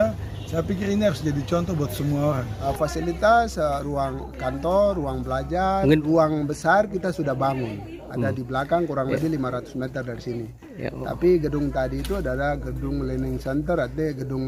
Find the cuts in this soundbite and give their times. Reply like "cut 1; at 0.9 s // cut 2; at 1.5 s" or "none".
cut 1; at 2.5 s